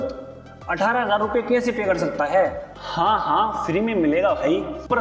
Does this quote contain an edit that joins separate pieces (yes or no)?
no